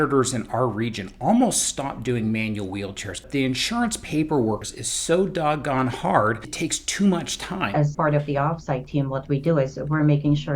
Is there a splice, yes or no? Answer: yes